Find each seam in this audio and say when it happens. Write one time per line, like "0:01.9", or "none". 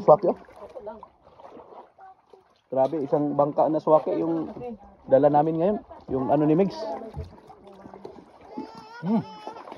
none

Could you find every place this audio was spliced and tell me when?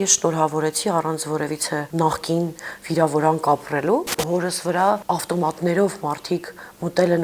0:01.9
0:04.2
0:05.0

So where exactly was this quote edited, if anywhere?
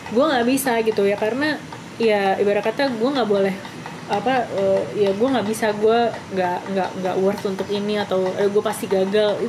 none

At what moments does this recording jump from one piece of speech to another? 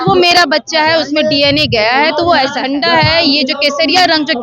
0:02.6

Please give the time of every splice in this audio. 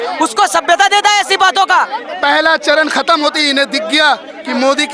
0:02.0

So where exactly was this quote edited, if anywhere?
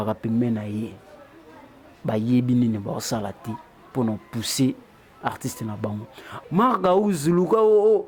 0:06.2

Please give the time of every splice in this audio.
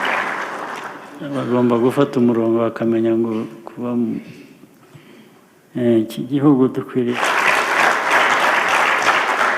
0:07.1

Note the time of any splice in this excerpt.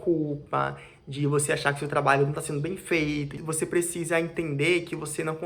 0:03.3

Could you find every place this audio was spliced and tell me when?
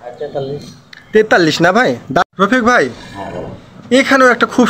0:02.3

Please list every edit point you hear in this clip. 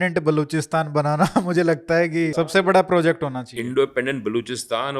0:02.3

